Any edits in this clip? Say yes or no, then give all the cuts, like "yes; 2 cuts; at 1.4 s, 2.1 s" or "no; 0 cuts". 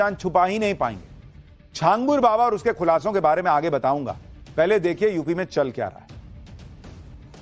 no; 0 cuts